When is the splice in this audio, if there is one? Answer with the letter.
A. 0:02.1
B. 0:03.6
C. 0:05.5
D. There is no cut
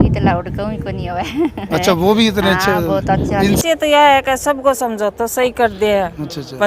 B